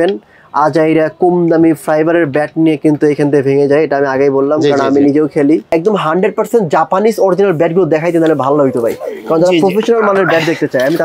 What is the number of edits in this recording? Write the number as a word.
one